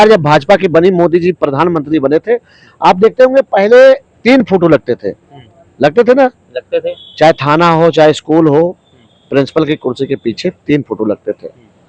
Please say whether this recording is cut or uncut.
uncut